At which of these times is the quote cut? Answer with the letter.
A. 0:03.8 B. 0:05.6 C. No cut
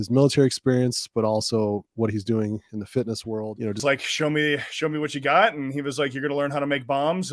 A